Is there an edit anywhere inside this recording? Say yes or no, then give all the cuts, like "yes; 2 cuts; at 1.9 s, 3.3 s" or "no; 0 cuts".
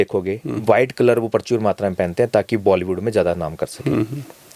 no; 0 cuts